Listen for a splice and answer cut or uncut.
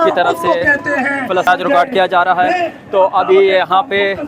cut